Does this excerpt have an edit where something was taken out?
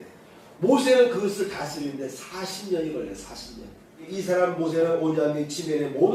yes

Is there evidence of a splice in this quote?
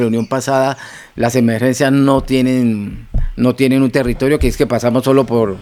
no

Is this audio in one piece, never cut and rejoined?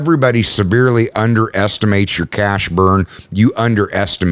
yes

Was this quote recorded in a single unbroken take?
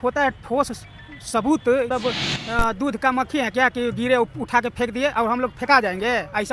no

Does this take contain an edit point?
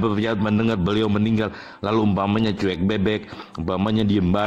no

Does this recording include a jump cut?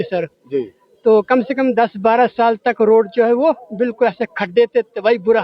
no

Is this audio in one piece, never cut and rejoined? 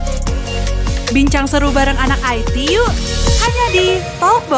yes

